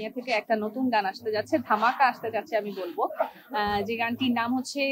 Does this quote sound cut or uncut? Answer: uncut